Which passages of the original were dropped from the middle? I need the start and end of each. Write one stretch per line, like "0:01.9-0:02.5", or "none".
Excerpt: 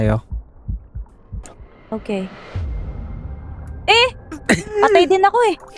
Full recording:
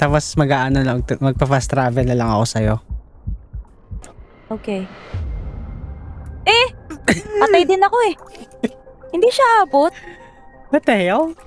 none